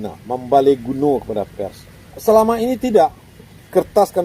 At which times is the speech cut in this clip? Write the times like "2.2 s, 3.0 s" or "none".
2.1 s